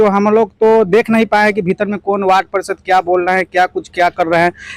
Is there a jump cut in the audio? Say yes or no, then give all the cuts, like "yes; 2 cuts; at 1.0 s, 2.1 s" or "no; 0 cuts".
no; 0 cuts